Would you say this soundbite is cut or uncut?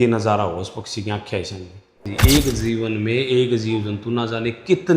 cut